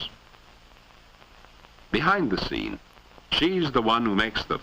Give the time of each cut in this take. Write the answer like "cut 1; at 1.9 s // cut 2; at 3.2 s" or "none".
cut 1; at 1.1 s